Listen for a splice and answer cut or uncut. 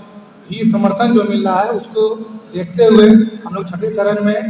uncut